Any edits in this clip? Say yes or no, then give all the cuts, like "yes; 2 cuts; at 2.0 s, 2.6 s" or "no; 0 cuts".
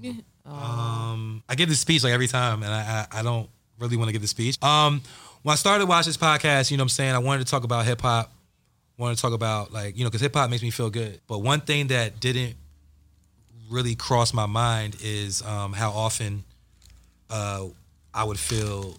yes; 3 cuts; at 1.4 s, 4.6 s, 11.2 s